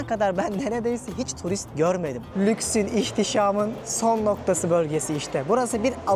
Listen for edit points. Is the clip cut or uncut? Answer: cut